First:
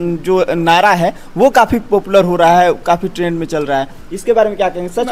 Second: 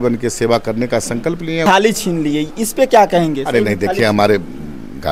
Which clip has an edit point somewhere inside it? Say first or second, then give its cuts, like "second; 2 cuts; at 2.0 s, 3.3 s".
second; 1 cut; at 1.6 s